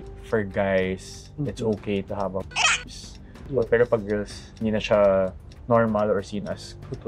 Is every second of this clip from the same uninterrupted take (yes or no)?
no